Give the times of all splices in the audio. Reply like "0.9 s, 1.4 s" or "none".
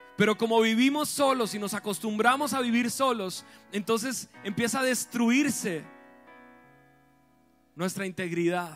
none